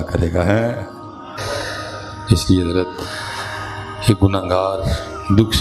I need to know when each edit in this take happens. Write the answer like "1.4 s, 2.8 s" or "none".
1.4 s